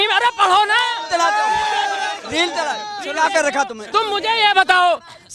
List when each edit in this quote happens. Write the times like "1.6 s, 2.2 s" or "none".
none